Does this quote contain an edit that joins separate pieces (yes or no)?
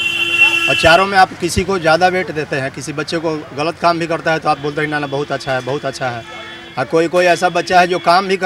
no